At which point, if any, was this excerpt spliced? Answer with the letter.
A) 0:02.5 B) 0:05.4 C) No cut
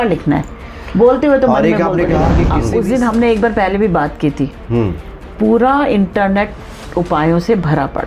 A